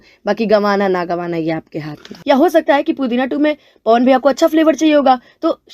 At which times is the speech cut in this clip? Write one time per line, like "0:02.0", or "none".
0:02.1